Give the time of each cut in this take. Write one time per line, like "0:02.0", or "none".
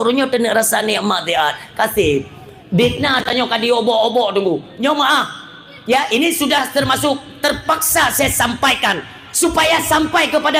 none